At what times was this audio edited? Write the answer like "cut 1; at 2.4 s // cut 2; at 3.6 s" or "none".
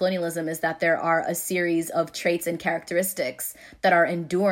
none